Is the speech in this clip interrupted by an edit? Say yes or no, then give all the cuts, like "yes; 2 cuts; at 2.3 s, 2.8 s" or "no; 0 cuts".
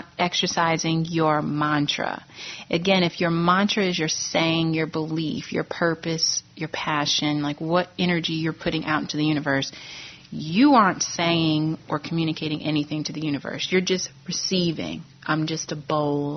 no; 0 cuts